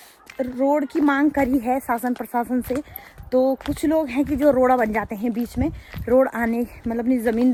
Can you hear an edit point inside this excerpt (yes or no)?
no